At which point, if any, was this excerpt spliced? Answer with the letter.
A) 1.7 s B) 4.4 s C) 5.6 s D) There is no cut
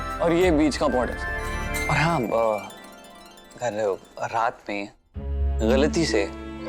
A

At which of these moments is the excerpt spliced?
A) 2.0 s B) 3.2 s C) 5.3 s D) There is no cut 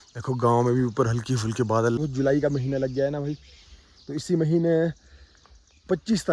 A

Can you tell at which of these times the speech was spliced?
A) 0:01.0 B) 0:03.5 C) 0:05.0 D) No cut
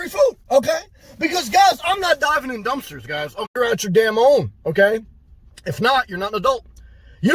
B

